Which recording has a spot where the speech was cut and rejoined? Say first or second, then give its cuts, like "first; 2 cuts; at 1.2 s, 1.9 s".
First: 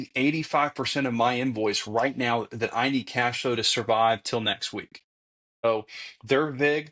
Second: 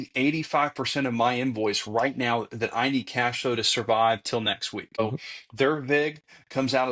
second; 1 cut; at 5.0 s